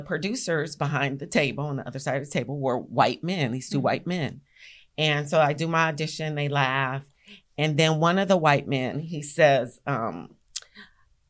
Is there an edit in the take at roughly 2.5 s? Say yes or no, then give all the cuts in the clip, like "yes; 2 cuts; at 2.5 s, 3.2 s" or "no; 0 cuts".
no; 0 cuts